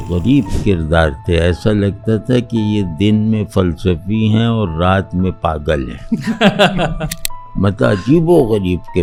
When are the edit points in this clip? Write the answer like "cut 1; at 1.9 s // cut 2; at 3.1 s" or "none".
none